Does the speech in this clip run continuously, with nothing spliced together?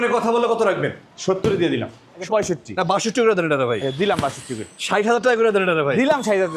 no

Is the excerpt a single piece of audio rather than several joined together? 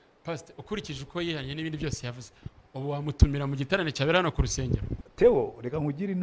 no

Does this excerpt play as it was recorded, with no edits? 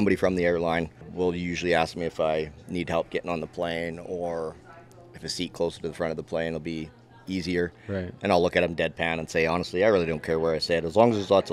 no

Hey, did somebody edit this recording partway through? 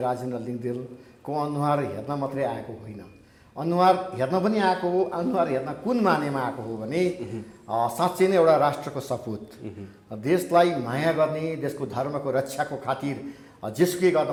no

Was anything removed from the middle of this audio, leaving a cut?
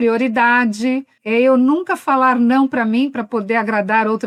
no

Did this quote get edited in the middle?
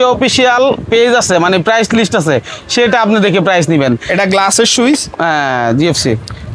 no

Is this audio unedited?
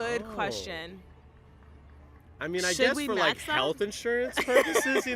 yes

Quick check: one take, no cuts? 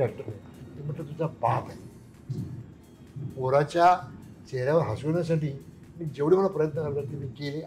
yes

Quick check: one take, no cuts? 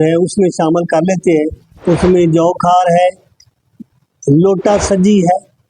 yes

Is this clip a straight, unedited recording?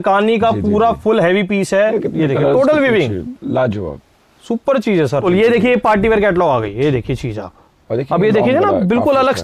no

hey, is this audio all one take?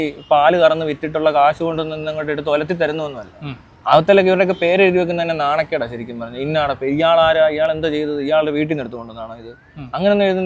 yes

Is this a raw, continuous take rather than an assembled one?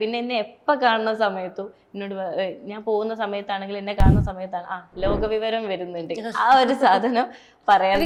yes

